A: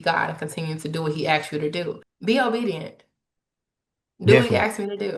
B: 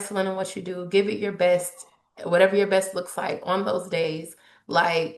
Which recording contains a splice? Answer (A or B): A